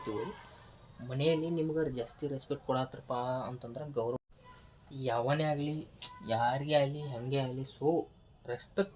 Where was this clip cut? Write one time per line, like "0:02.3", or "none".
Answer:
0:04.2